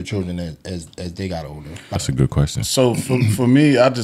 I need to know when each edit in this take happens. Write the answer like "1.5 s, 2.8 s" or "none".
1.9 s